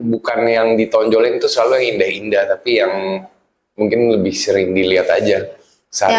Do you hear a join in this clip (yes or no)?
no